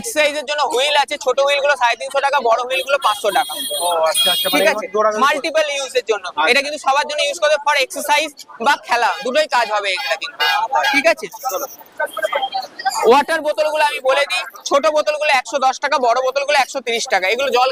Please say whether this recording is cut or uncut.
uncut